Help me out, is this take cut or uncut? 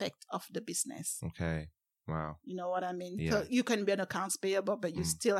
uncut